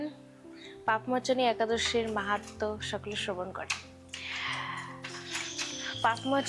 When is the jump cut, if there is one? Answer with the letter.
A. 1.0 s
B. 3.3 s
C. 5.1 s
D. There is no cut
D